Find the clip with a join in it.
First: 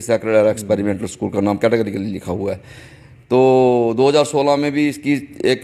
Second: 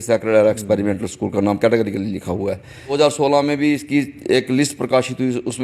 second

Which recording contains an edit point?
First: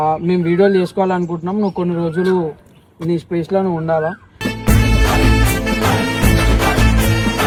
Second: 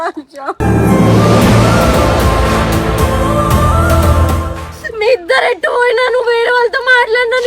second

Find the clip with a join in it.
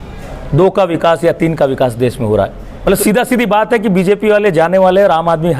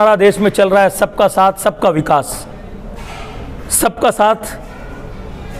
first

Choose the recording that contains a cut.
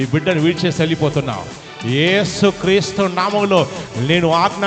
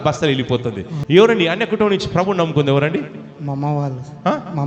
second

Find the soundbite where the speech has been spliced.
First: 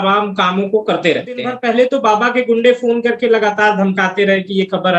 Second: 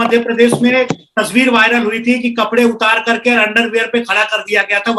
first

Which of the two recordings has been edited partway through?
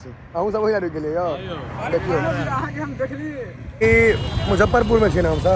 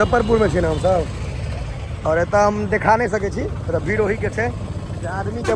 first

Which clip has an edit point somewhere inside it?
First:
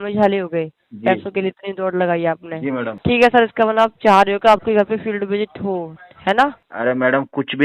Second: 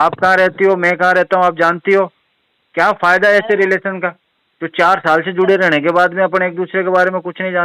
first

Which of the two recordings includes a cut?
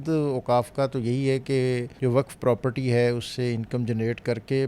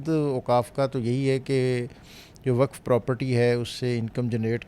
first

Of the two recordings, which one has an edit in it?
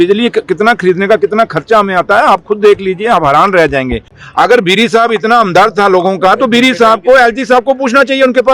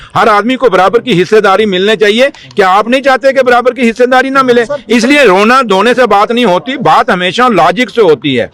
first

